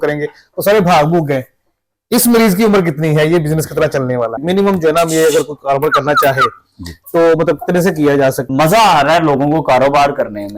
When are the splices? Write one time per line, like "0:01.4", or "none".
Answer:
0:04.4
0:08.4